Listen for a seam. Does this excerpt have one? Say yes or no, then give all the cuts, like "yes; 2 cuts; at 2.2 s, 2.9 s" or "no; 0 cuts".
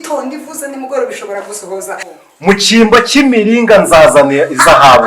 yes; 1 cut; at 2.1 s